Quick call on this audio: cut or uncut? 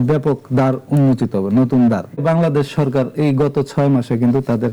cut